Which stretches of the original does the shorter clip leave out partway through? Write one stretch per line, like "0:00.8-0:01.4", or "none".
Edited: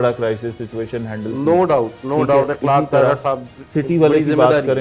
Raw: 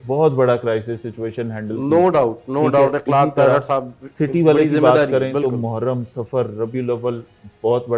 none